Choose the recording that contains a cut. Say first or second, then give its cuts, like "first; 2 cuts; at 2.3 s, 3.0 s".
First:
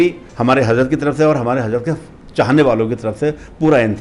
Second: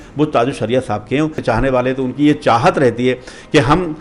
second; 1 cut; at 1.4 s